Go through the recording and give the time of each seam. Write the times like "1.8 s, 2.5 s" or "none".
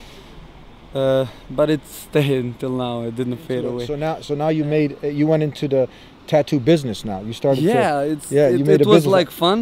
3.9 s